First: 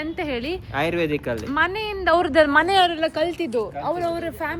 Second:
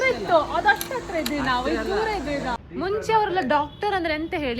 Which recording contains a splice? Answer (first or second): second